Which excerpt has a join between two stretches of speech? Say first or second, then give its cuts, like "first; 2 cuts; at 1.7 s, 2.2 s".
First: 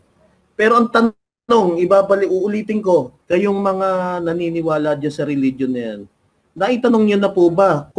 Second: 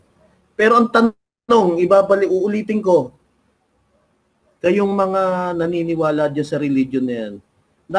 first; 1 cut; at 3.2 s